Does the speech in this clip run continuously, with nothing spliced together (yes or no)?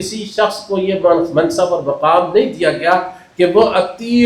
yes